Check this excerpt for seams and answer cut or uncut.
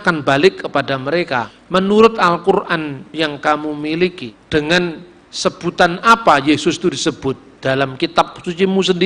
cut